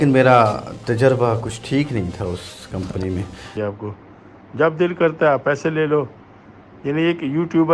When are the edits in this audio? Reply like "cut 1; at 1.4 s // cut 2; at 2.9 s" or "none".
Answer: cut 1; at 3.5 s